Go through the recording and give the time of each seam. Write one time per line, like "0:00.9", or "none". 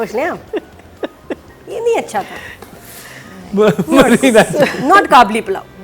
none